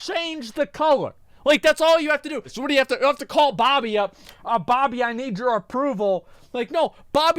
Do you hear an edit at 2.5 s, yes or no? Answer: yes